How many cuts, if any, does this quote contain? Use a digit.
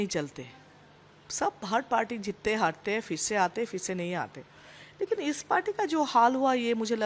0